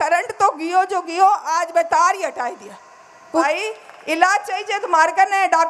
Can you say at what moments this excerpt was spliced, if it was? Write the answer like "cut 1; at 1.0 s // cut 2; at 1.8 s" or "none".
cut 1; at 3.4 s